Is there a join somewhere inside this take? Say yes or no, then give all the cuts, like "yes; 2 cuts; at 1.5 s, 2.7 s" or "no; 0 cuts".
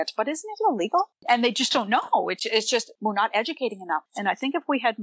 yes; 2 cuts; at 1.2 s, 4.1 s